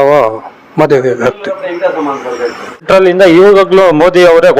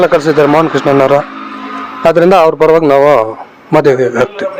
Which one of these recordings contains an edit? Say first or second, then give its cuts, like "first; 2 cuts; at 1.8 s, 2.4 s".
first; 1 cut; at 2.8 s